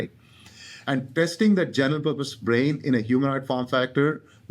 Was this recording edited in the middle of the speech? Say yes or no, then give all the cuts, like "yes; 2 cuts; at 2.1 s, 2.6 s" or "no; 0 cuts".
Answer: yes; 1 cut; at 1.1 s